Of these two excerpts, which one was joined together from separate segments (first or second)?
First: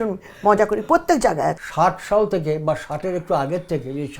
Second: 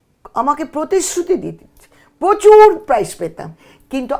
first